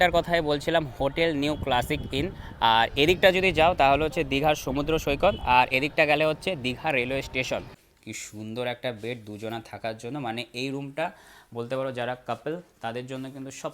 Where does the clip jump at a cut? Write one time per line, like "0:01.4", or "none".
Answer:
0:07.8